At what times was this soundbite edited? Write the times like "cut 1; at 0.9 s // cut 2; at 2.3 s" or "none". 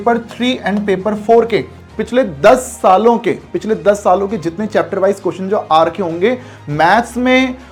none